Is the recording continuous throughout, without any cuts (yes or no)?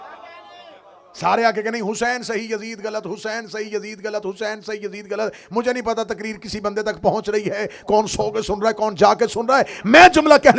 yes